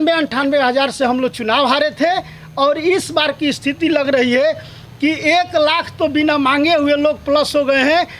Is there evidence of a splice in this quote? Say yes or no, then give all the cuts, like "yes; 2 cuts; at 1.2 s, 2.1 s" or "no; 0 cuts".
no; 0 cuts